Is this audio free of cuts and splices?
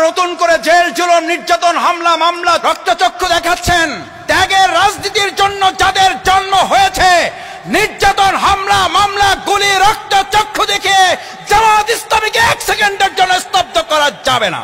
no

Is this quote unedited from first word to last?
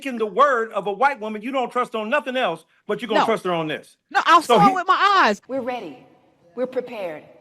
no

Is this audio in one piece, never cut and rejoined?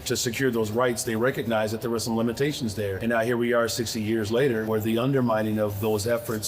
yes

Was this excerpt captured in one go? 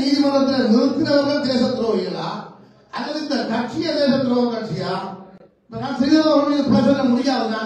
yes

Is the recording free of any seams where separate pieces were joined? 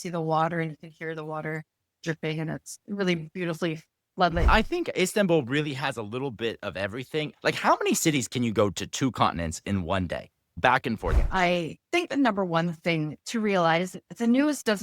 no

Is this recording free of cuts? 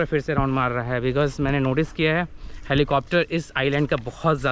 yes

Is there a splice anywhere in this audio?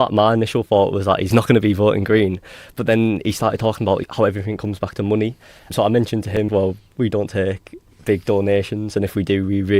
yes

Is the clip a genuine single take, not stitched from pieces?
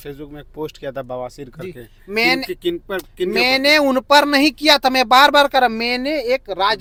yes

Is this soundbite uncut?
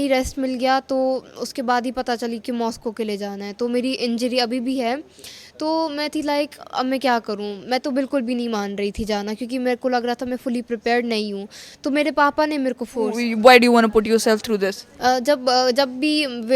no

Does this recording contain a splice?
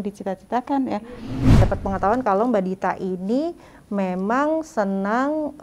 yes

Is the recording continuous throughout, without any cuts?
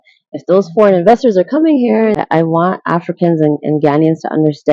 no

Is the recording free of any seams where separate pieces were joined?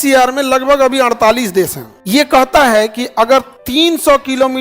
no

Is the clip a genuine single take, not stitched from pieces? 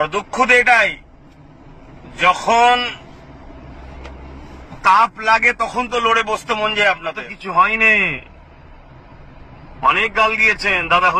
no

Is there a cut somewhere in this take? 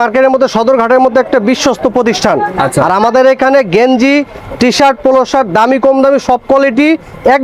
no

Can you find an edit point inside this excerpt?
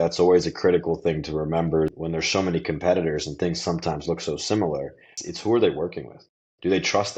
yes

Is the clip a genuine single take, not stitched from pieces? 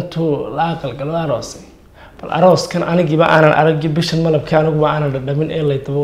yes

